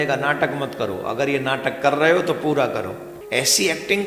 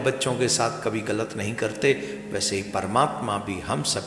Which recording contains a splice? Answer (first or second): first